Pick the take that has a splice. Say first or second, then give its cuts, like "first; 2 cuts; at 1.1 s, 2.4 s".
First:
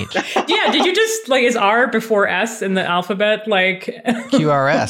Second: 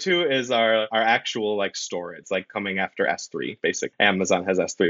second; 3 cuts; at 0.9 s, 2.2 s, 3.9 s